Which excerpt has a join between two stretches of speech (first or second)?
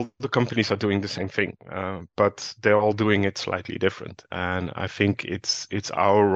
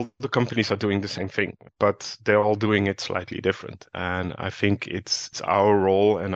second